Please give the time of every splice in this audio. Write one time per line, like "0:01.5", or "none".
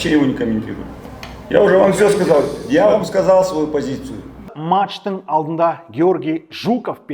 0:04.6